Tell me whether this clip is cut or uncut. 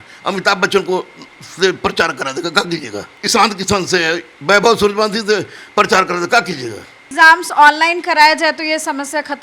cut